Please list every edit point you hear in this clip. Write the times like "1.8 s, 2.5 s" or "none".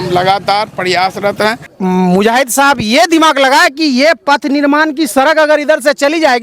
1.7 s